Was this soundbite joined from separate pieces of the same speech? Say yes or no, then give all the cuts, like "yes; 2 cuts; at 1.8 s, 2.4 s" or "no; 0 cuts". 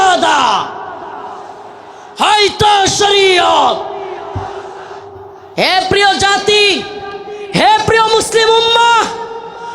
yes; 1 cut; at 5.3 s